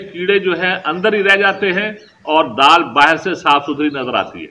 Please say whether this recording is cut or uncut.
uncut